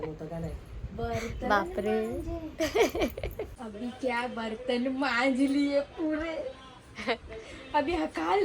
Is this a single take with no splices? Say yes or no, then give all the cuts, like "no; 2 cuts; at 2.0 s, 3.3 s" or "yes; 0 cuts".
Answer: no; 1 cut; at 3.5 s